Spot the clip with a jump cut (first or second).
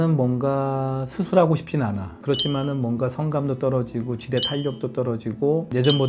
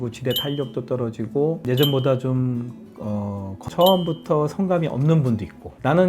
second